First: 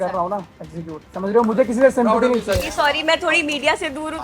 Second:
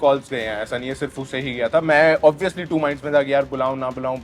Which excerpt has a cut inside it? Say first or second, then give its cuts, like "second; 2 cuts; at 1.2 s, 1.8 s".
first; 2 cuts; at 1.0 s, 2.6 s